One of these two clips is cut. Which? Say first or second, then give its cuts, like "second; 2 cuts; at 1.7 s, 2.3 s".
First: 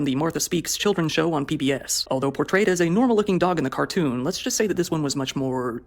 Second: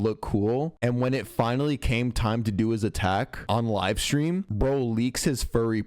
first; 1 cut; at 1.9 s